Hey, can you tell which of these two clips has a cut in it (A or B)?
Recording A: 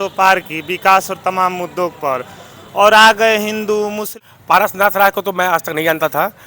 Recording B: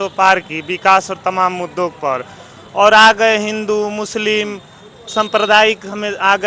A